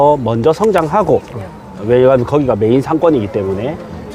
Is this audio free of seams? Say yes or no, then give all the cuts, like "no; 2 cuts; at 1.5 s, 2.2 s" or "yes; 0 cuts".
yes; 0 cuts